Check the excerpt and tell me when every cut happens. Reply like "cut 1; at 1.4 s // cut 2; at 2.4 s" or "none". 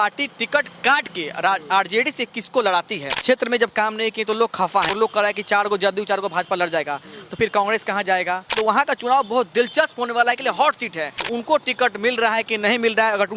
cut 1; at 3.1 s // cut 2; at 4.9 s // cut 3; at 8.6 s // cut 4; at 11.3 s

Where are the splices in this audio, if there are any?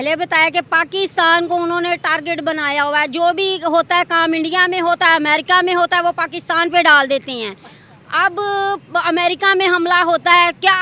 none

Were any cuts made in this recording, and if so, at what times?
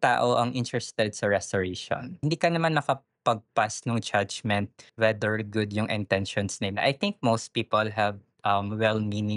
cut 1; at 2.2 s // cut 2; at 4.8 s

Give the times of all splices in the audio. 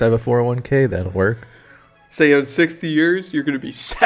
none

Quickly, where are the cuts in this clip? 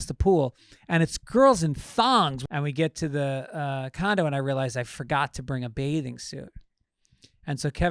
cut 1; at 2.4 s

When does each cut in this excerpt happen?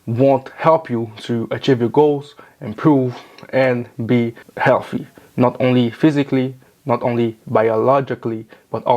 cut 1; at 4.4 s

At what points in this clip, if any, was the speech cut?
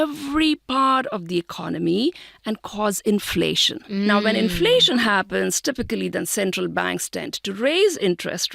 cut 1; at 4.2 s

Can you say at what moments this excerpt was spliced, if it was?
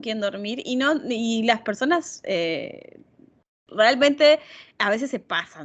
none

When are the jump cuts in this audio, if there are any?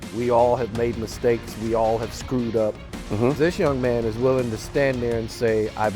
cut 1; at 3.3 s

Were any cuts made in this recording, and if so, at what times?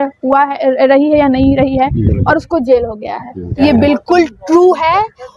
cut 1; at 3.5 s

